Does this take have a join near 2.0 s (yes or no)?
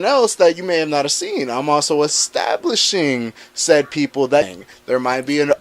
no